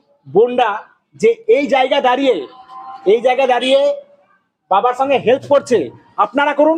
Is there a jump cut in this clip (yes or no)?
no